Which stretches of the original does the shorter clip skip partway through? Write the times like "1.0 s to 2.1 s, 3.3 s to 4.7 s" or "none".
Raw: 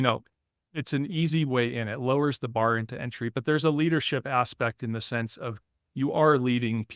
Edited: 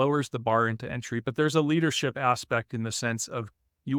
none